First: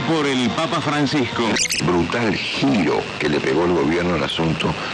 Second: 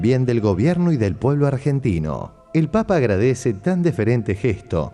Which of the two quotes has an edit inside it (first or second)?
second